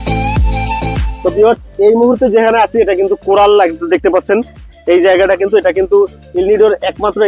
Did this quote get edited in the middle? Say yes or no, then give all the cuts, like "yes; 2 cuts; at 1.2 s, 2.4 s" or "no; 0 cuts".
yes; 1 cut; at 1.1 s